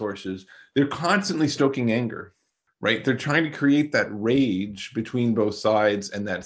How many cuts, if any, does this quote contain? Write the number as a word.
zero